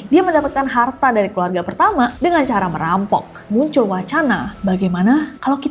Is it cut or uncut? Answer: cut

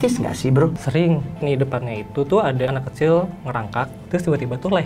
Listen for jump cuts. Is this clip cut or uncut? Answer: cut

